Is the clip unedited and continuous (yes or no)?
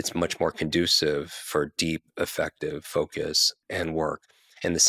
no